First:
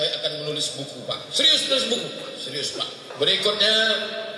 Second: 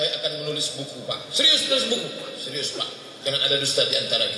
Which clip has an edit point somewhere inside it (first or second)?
first